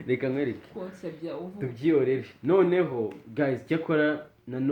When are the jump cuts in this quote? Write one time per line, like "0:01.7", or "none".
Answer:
none